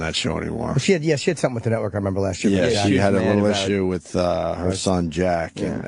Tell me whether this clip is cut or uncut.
uncut